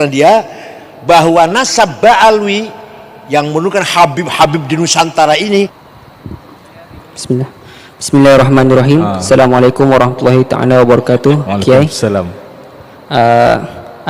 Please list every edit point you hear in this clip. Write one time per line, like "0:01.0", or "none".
0:05.8